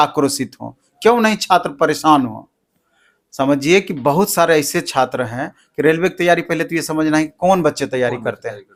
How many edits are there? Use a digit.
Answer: 0